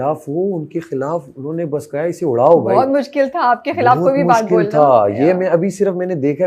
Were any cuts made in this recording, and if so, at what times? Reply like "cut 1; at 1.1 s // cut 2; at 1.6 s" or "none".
none